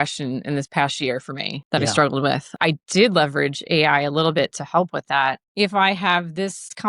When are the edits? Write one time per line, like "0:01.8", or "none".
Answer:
0:01.5
0:02.6
0:05.4